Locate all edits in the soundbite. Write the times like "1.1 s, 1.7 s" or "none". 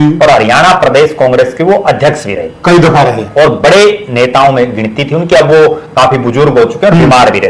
none